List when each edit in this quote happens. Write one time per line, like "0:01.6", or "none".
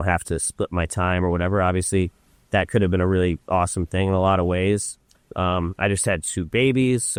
none